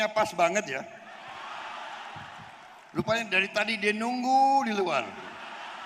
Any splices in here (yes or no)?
no